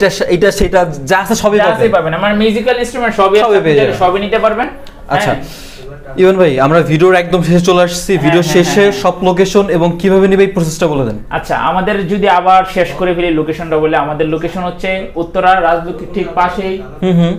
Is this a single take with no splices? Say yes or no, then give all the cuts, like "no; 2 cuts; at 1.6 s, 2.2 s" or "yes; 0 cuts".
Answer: yes; 0 cuts